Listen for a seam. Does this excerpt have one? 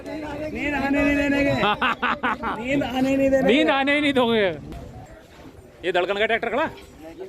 yes; 1 cut; at 5.1 s

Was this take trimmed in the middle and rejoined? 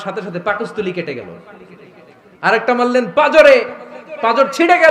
no; 0 cuts

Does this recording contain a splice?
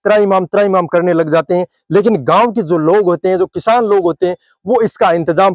no; 0 cuts

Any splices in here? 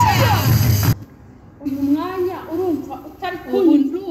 yes; 1 cut; at 1.0 s

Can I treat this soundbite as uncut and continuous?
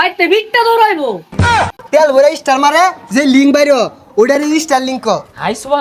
no; 1 cut; at 1.5 s

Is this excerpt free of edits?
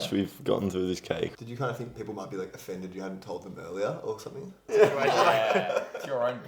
no; 2 cuts; at 1.3 s, 4.6 s

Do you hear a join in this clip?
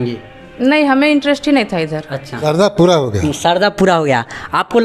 yes; 1 cut; at 2.2 s

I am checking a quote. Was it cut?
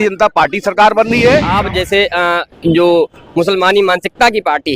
yes; 1 cut; at 1.5 s

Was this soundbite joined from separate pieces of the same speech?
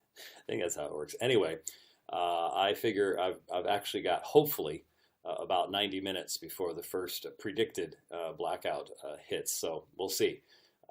yes; 1 cut; at 1.3 s

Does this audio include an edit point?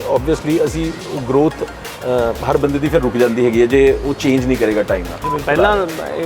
yes; 1 cut; at 5.3 s

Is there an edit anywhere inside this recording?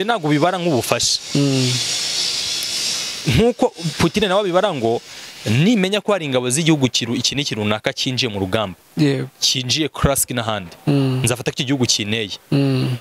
no; 0 cuts

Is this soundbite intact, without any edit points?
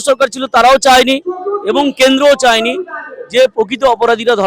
yes; 0 cuts

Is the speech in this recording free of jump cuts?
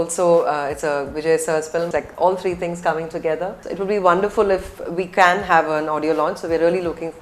no; 2 cuts; at 1.9 s, 3.6 s

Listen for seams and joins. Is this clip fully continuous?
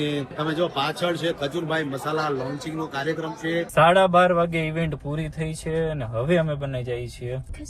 no; 1 cut; at 3.7 s

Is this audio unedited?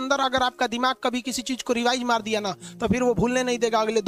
yes; 0 cuts

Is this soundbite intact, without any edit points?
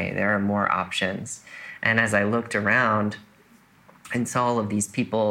yes; 0 cuts

